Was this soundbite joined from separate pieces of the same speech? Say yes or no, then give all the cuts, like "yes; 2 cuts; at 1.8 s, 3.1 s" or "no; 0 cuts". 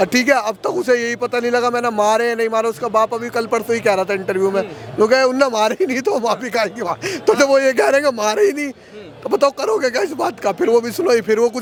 no; 0 cuts